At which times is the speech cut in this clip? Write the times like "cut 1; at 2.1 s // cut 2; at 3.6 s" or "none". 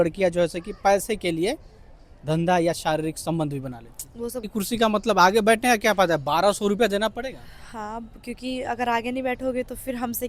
cut 1; at 4.5 s

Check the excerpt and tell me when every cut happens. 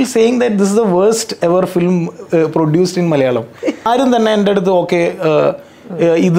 cut 1; at 3.9 s

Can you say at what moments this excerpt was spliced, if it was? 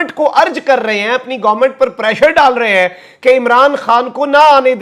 none

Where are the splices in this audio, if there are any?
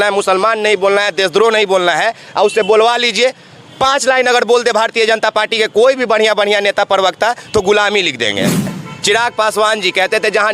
cut 1; at 8.9 s

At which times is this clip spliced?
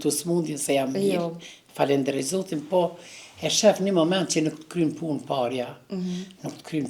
none

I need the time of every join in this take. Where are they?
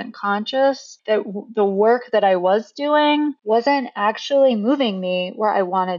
cut 1; at 0.9 s // cut 2; at 3.4 s

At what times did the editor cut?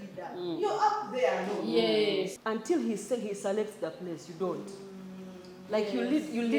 cut 1; at 2.3 s

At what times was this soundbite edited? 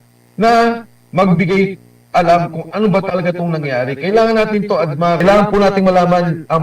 cut 1; at 5.2 s

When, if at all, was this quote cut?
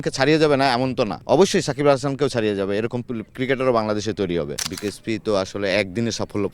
cut 1; at 1.2 s // cut 2; at 4.6 s

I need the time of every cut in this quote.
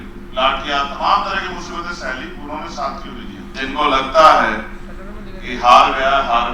cut 1; at 3.6 s

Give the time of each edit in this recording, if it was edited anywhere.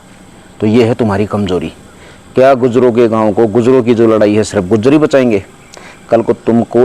none

